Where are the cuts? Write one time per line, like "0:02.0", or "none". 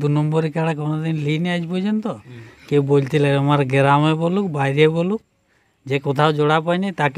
none